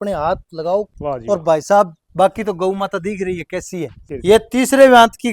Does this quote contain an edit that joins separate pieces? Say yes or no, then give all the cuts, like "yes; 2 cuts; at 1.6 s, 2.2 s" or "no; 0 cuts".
yes; 2 cuts; at 0.9 s, 4.0 s